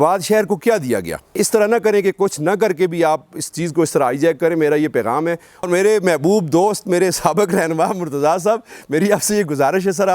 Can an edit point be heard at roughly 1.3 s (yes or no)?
yes